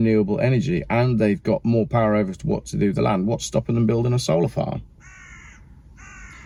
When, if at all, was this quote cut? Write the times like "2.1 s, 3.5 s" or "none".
none